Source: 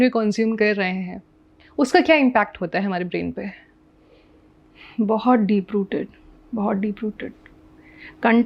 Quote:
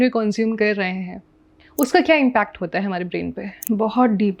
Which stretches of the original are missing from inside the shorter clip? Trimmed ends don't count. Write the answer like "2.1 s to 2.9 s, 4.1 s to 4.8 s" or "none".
3.5 s to 4.8 s